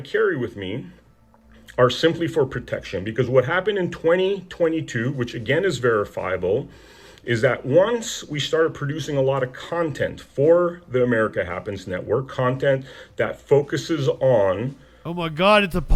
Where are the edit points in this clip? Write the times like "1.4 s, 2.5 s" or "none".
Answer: none